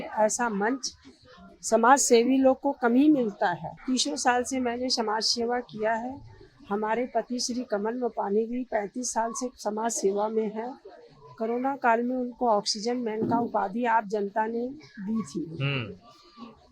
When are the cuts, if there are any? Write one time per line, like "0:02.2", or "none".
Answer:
0:03.7